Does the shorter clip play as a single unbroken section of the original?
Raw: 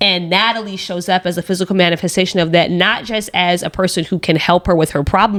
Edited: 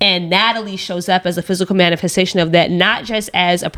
yes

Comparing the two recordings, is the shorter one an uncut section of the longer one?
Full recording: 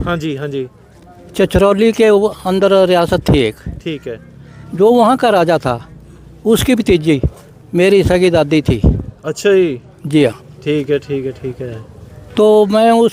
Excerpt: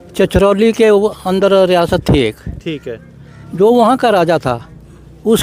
yes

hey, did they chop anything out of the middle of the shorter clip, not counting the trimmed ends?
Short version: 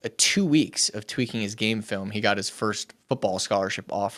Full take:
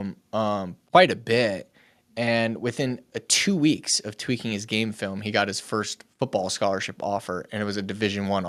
no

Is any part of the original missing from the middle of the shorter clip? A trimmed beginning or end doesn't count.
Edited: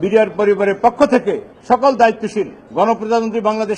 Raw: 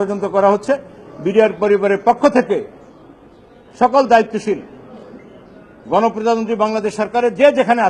yes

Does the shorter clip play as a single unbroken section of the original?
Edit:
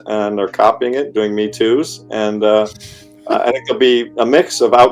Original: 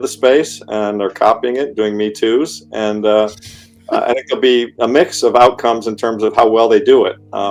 yes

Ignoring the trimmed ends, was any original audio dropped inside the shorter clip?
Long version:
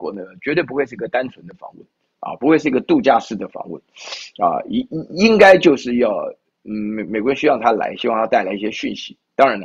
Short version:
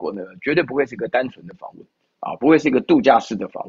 no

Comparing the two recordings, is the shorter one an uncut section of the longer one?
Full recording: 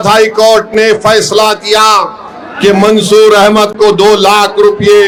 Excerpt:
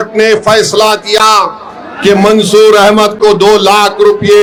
yes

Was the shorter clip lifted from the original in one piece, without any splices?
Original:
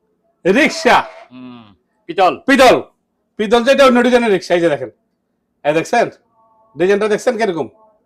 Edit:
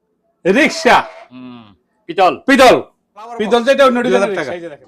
yes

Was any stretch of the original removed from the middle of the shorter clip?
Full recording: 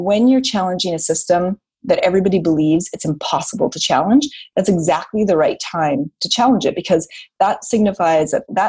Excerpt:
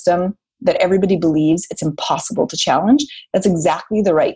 no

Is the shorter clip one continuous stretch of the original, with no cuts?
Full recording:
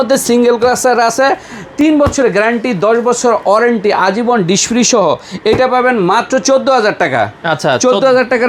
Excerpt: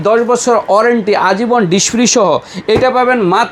yes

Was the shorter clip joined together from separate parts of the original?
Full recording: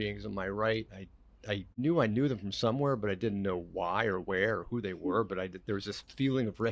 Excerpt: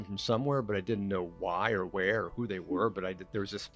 no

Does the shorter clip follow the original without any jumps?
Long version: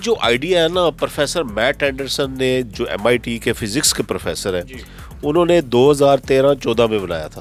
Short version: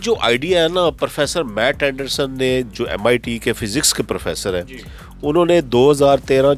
yes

